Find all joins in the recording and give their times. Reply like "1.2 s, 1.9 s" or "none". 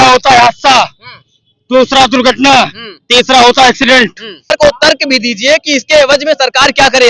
4.5 s